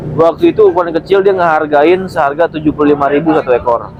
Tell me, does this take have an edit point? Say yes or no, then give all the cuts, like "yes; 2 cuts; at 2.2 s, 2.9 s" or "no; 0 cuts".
no; 0 cuts